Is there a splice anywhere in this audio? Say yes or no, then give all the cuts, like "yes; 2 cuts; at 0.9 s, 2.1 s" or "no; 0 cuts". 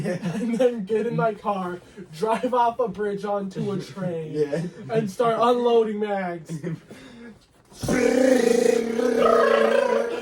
no; 0 cuts